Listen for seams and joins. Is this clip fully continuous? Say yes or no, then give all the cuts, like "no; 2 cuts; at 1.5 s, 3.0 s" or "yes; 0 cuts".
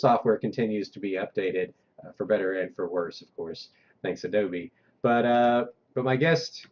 yes; 0 cuts